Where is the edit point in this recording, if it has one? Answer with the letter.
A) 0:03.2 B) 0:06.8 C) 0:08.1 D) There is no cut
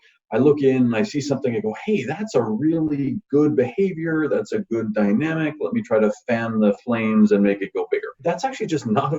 C